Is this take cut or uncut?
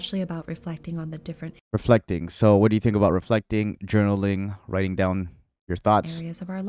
uncut